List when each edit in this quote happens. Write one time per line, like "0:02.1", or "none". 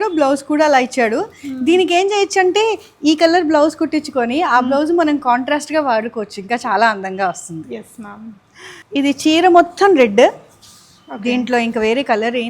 none